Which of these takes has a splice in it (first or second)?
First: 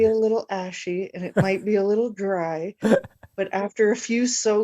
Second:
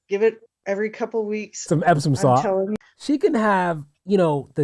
second